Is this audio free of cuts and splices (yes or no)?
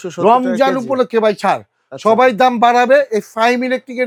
yes